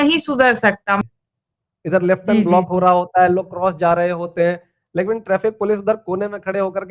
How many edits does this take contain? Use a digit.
1